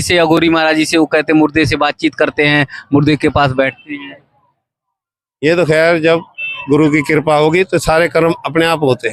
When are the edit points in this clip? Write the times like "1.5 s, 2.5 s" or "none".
none